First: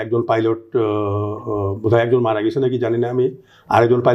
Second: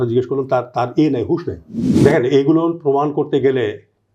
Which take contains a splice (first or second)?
second